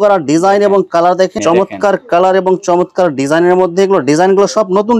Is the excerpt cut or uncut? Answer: cut